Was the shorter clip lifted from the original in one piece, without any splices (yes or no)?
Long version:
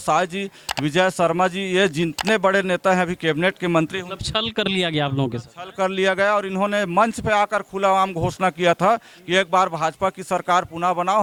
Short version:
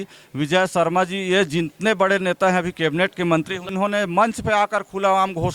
no